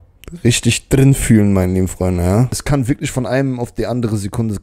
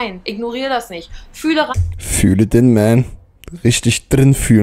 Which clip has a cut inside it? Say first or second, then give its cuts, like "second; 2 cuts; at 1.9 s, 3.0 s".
first; 1 cut; at 2.6 s